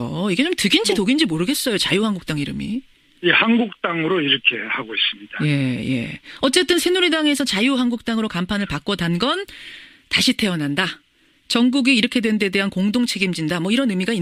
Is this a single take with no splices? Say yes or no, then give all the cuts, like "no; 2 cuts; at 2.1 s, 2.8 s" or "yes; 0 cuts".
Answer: yes; 0 cuts